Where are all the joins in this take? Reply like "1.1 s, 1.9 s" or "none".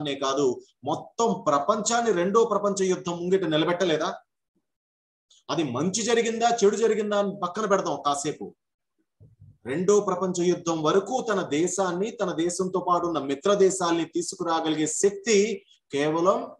none